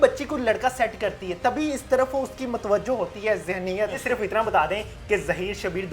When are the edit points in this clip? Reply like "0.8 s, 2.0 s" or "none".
4.0 s